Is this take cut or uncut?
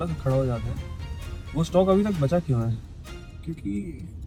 uncut